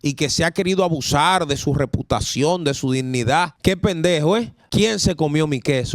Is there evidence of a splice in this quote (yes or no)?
yes